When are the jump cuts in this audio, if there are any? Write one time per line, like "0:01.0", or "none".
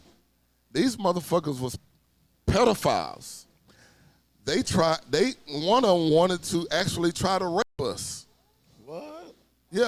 none